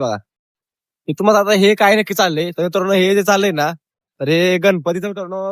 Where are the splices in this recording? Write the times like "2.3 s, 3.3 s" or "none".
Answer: none